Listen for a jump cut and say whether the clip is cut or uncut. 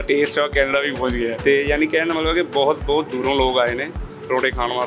cut